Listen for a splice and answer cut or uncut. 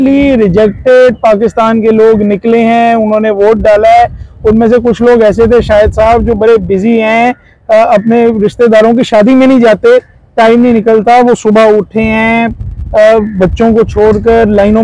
uncut